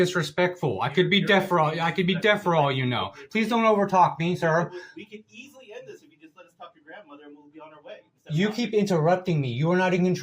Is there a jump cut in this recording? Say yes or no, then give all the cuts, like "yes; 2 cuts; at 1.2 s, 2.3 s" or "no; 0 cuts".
no; 0 cuts